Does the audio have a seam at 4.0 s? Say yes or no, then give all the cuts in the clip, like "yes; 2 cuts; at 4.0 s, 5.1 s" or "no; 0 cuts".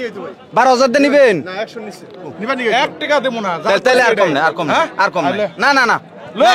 no; 1 cut; at 2.4 s